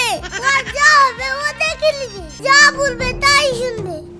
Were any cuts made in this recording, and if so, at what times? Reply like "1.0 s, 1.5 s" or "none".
2.2 s